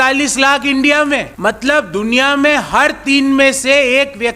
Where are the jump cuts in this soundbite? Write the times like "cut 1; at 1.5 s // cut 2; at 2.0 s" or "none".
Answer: cut 1; at 1.3 s

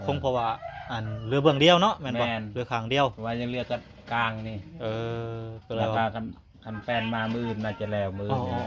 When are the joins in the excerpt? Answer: none

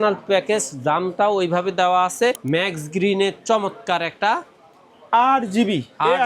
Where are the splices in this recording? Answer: cut 1; at 2.4 s

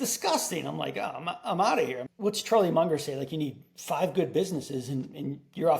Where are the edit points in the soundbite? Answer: cut 1; at 2.0 s

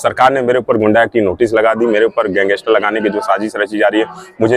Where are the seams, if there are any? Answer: none

